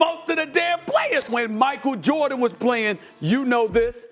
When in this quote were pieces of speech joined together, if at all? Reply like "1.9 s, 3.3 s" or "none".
1.3 s